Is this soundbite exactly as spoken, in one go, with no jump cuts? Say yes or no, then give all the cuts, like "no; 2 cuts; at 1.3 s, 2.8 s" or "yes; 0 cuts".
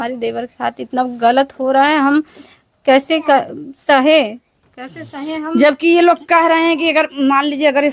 yes; 0 cuts